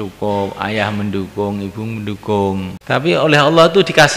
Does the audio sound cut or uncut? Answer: cut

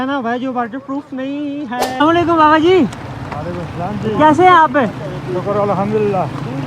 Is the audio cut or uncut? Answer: cut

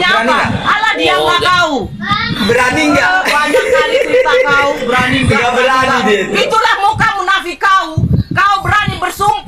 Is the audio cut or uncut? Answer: uncut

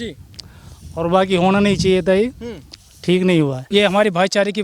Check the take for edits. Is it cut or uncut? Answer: cut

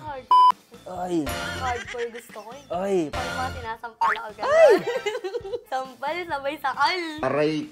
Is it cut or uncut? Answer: cut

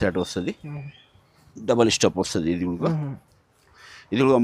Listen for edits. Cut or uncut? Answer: uncut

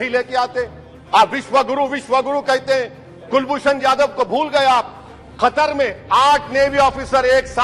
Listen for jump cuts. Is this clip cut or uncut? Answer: uncut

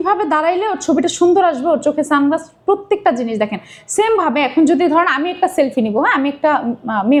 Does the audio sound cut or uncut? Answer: uncut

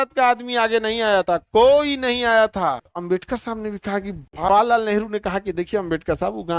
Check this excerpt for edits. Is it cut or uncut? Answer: cut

